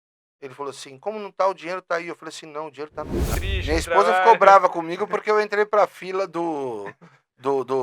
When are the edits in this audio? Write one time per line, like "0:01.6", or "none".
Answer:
0:03.3